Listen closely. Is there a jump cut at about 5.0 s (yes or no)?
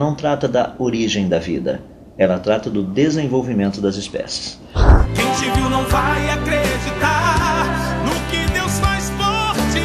yes